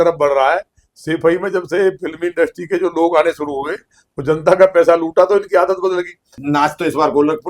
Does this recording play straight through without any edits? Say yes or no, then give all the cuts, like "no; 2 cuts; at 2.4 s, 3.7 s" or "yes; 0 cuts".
no; 1 cut; at 6.4 s